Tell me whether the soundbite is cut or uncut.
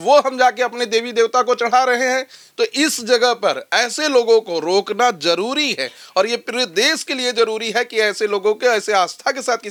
uncut